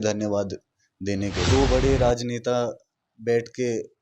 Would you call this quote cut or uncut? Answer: cut